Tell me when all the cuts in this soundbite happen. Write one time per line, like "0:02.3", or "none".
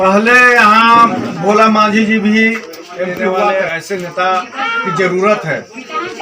0:03.5